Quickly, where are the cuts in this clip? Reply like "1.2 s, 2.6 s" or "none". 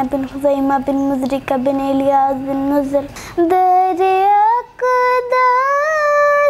3.2 s

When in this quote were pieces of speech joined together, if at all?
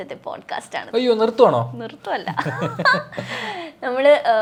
none

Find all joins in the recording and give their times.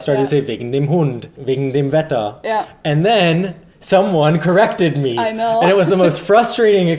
1.3 s

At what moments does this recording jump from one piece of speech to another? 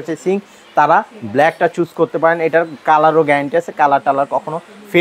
none

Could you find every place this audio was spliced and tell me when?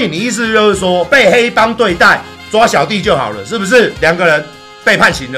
3.9 s

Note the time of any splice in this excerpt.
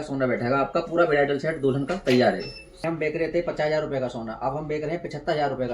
2.8 s

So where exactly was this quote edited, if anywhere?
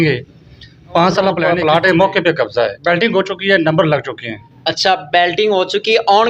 1.5 s

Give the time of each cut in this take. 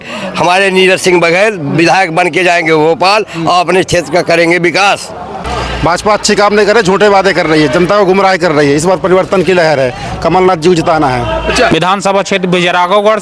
5.4 s, 11.7 s

